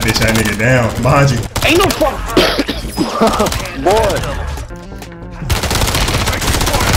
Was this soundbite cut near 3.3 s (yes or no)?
no